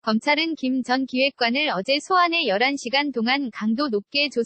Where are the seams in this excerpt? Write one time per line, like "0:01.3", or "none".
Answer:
0:01.0